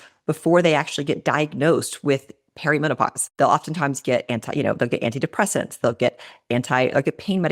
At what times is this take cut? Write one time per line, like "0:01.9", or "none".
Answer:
0:03.2

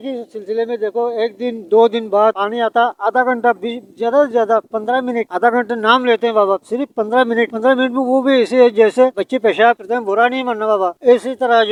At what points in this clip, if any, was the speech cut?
none

